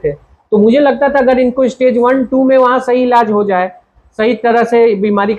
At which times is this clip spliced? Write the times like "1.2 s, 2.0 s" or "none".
none